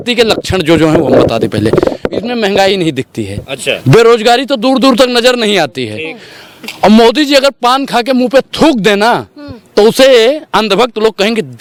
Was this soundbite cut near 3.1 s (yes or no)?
no